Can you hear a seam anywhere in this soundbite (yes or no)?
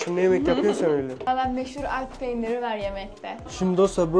no